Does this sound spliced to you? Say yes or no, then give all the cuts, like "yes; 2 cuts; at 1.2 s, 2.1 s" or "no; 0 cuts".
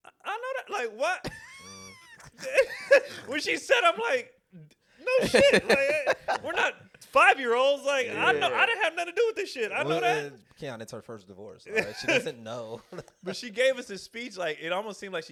no; 0 cuts